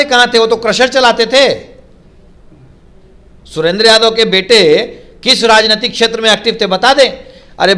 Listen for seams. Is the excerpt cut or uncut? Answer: uncut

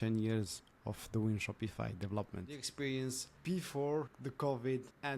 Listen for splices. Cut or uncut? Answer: cut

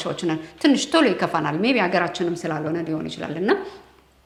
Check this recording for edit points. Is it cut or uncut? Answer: uncut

